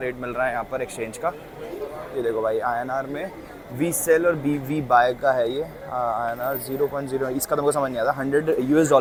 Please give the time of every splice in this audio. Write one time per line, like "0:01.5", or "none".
none

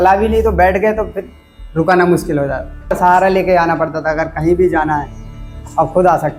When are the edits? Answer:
0:03.0

